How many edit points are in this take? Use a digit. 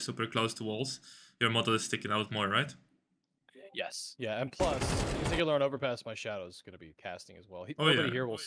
0